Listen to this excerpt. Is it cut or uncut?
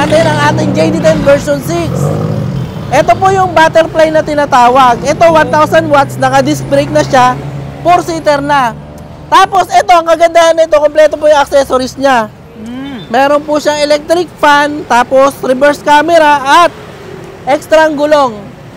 uncut